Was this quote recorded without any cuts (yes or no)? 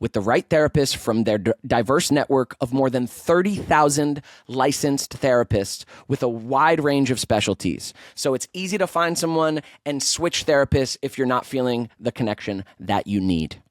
yes